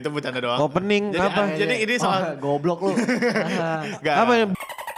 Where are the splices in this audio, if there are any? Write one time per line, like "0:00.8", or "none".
none